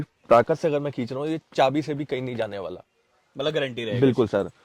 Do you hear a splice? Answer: no; 0 cuts

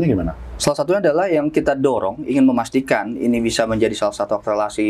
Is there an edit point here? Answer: no; 0 cuts

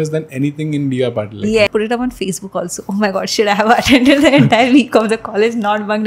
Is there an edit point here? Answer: yes; 1 cut; at 1.7 s

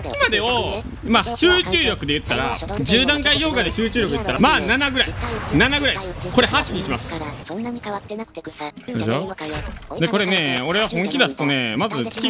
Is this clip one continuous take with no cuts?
yes; 0 cuts

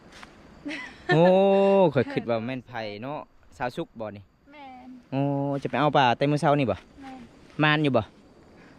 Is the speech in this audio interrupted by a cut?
no; 0 cuts

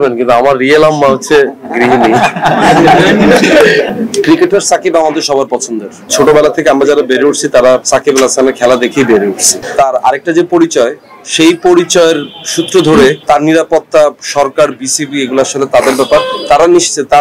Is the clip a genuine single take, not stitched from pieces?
no; 2 cuts; at 3.9 s, 6.1 s

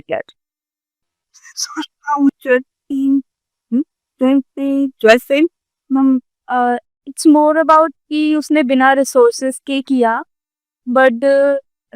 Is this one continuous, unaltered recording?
yes; 0 cuts

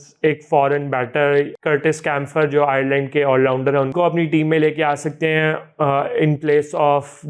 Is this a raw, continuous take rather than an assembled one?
no; 2 cuts; at 1.5 s, 3.9 s

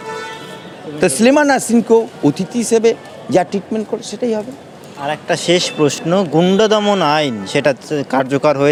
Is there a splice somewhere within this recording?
no; 0 cuts

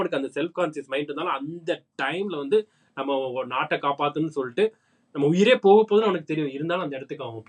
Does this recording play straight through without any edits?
yes; 0 cuts

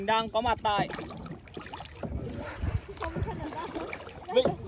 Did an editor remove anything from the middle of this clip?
no; 0 cuts

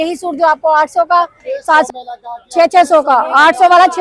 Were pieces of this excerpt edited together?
yes; 1 cut; at 1.9 s

